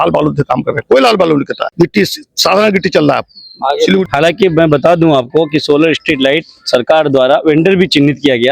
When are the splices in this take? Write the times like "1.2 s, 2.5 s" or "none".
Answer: 1.6 s, 4.1 s